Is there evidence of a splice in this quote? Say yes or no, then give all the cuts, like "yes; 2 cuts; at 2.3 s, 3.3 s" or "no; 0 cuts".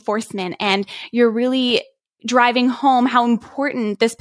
no; 0 cuts